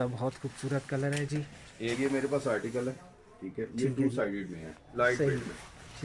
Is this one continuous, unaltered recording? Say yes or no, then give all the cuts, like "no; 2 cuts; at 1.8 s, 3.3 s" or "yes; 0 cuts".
no; 2 cuts; at 2.0 s, 4.8 s